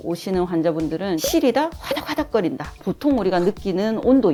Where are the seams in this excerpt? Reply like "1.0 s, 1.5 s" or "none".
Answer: none